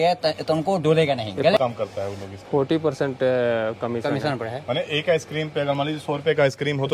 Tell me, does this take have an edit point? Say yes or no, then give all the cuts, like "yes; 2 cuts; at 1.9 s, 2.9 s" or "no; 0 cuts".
yes; 1 cut; at 1.6 s